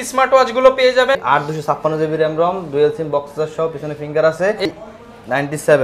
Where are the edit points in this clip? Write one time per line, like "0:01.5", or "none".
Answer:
0:01.2
0:04.7

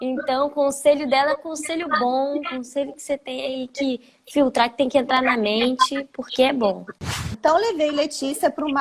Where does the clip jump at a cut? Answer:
0:06.9

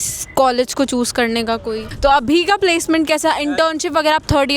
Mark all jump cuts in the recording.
0:01.9

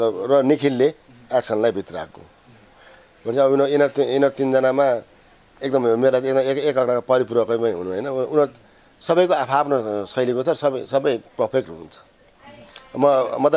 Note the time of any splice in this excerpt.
none

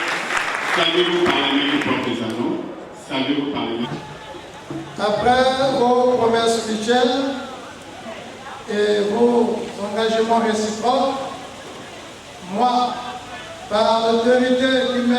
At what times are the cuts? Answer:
0:03.9

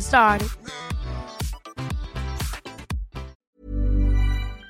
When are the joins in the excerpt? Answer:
0:03.3

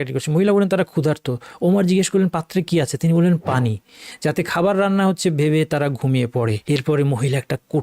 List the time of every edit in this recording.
0:06.6

